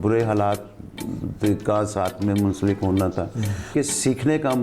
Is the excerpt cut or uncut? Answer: cut